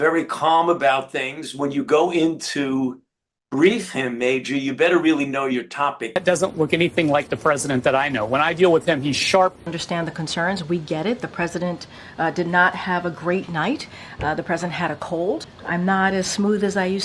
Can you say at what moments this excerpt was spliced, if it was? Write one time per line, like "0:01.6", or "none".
0:06.1
0:09.7
0:14.0
0:15.5